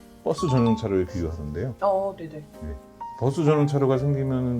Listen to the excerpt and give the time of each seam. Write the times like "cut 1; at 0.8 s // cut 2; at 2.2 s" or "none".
none